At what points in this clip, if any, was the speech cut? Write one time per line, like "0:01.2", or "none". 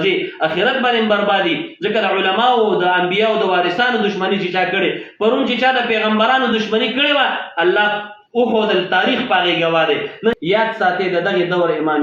0:10.3

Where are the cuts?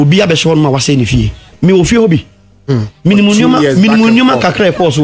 0:01.5

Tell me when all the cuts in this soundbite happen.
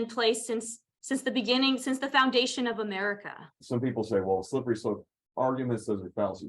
0:03.6

